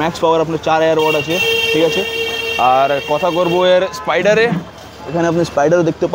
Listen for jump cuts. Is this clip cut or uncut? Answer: uncut